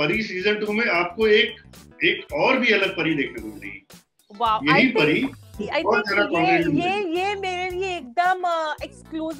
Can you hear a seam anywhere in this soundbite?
no; 0 cuts

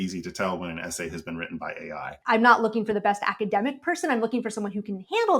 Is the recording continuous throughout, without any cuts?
no; 1 cut; at 2.1 s

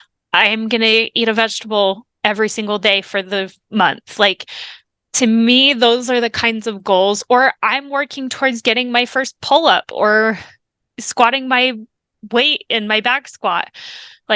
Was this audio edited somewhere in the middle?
no; 0 cuts

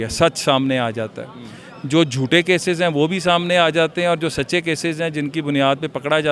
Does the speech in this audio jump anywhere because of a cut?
no; 0 cuts

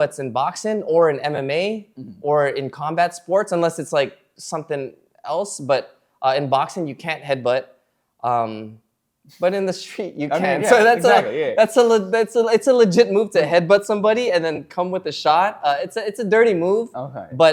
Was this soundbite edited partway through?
no; 0 cuts

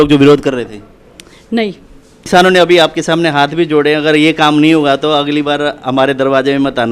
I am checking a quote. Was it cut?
yes; 1 cut; at 2.3 s

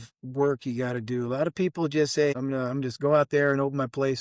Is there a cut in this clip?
yes; 1 cut; at 2.3 s

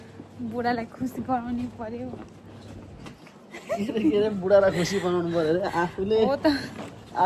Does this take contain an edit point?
no; 0 cuts

